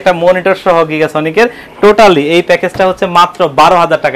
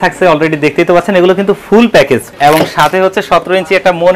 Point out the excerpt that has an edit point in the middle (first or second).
second